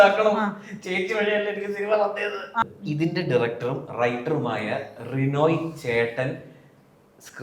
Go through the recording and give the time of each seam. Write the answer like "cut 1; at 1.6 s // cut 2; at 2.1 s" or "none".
cut 1; at 2.6 s